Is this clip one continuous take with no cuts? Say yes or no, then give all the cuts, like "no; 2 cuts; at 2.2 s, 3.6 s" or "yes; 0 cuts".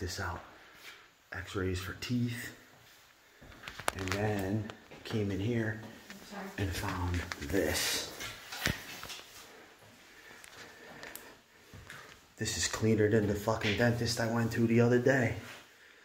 yes; 0 cuts